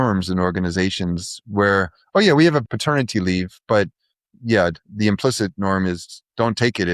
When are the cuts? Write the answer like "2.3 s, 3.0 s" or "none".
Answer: 2.7 s